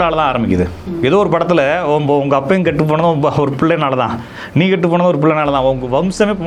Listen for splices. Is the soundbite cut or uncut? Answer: uncut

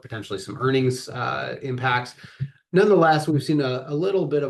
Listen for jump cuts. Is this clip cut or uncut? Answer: uncut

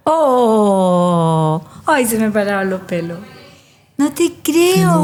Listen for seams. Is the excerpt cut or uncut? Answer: uncut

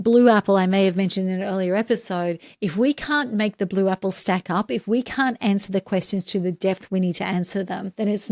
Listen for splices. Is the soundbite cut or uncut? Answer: uncut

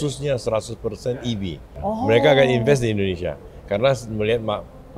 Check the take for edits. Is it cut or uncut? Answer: cut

